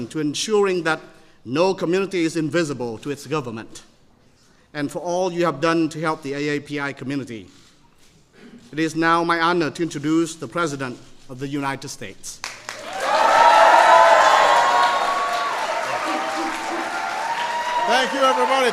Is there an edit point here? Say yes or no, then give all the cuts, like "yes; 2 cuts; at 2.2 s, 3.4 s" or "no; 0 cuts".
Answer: no; 0 cuts